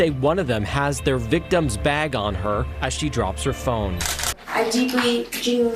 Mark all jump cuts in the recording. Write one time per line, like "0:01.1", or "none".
0:04.3